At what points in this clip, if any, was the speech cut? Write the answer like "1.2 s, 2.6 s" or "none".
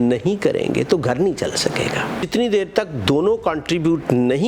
2.2 s